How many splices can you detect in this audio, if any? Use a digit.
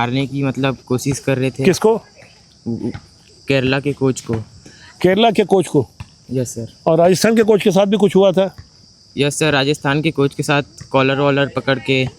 0